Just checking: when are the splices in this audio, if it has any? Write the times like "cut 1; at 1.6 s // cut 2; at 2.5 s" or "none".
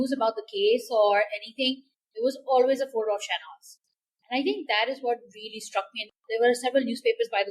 cut 1; at 6.1 s

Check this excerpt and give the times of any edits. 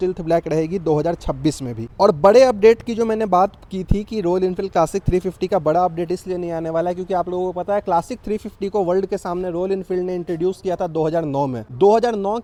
none

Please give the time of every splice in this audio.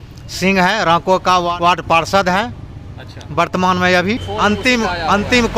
cut 1; at 1.5 s // cut 2; at 4.3 s

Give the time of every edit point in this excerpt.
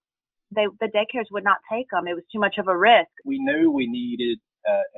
cut 1; at 3.2 s

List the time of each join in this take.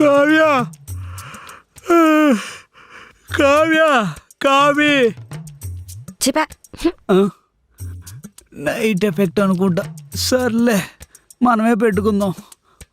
none

